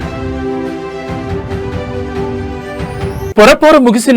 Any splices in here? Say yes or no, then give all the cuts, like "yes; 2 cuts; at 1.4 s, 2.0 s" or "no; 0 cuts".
yes; 1 cut; at 2.8 s